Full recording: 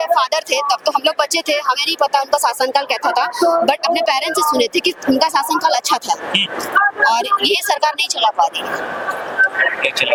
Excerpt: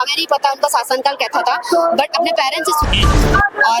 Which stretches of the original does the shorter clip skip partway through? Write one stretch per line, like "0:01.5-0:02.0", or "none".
0:04.5-0:06.2